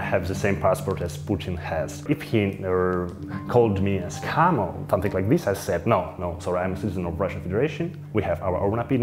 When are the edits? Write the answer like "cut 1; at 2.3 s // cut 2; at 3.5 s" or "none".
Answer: cut 1; at 2.0 s // cut 2; at 8.0 s